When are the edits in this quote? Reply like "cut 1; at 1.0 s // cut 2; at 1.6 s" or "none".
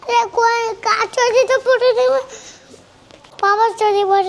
cut 1; at 3.2 s